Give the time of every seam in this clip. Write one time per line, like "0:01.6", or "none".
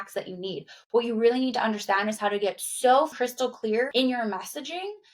0:03.5